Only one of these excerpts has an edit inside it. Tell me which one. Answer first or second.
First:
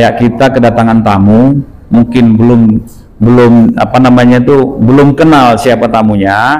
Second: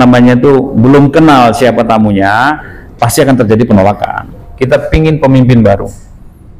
second